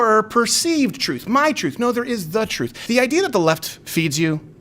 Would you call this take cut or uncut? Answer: cut